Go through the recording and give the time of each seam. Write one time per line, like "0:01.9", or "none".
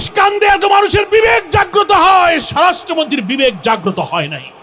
none